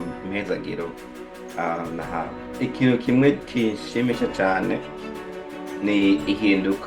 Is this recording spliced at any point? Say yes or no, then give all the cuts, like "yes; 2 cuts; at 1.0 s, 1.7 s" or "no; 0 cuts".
yes; 1 cut; at 2.6 s